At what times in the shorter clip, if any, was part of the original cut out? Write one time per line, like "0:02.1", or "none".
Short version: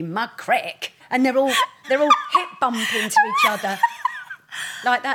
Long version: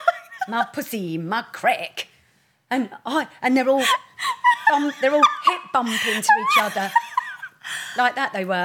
0:01.0
0:01.8